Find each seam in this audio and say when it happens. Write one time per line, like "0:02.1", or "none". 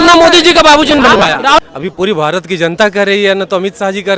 0:01.6